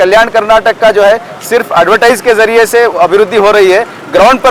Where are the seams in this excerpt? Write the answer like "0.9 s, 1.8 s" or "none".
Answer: none